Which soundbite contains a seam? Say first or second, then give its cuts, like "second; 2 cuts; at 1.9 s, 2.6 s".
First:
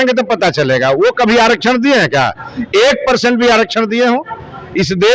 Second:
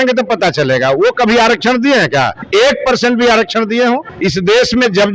second; 2 cuts; at 2.4 s, 4.1 s